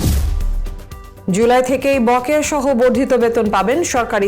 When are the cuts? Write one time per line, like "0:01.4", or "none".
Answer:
0:01.3